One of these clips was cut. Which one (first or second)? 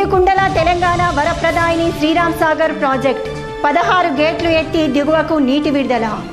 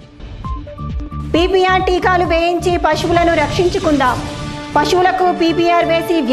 second